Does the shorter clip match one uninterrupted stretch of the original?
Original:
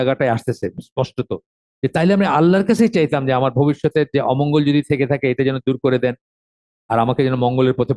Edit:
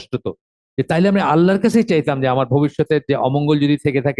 yes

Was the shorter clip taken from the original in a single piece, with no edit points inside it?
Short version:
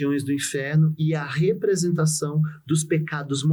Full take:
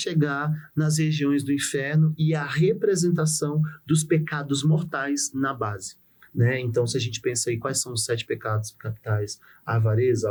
yes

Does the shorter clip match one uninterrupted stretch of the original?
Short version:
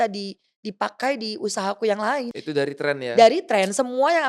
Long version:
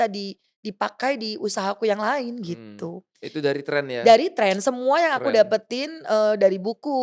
no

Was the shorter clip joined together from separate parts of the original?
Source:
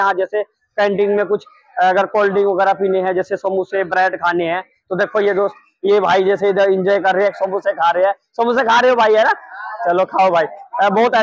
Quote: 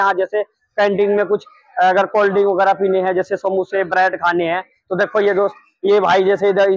no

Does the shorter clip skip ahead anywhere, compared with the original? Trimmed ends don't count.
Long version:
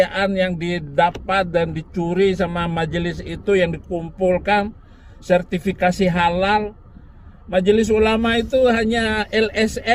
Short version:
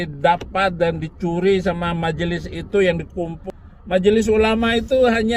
yes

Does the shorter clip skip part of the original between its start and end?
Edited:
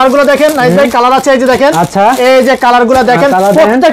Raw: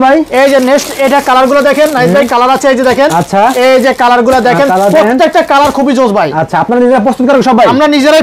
no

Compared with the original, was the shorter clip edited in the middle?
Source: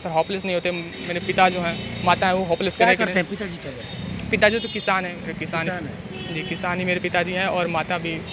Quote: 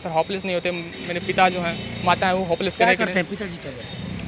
no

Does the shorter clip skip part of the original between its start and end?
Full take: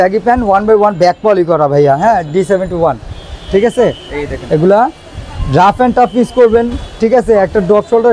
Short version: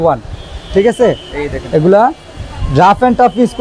no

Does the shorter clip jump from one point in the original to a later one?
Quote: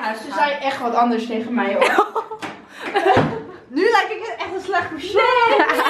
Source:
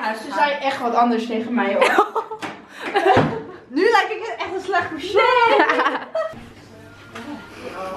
no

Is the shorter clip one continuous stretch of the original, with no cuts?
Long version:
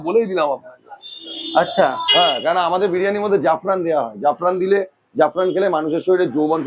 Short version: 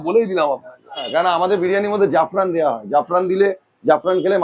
no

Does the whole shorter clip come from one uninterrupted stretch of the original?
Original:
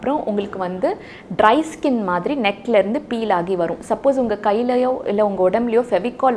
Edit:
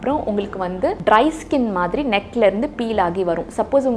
no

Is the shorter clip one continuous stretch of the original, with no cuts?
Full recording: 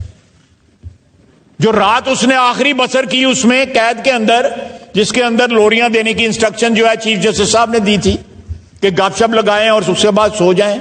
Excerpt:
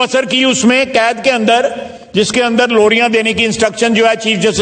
yes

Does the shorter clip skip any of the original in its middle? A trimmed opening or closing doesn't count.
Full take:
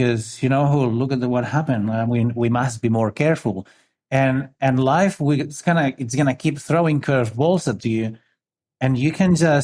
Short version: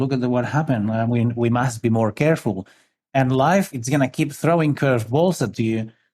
yes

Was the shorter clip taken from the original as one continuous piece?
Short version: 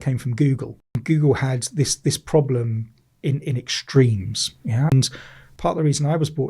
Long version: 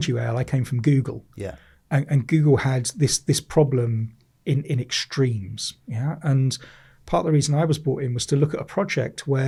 no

